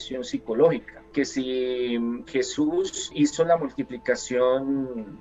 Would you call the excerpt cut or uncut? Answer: cut